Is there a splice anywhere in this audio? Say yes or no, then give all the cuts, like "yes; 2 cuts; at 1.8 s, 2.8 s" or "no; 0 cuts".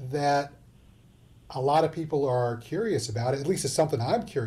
no; 0 cuts